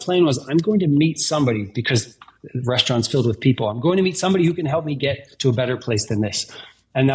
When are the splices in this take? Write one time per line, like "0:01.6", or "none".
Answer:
none